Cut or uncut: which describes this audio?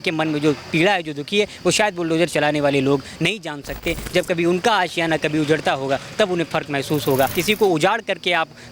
cut